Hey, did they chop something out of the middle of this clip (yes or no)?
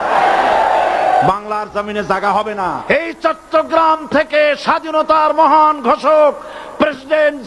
yes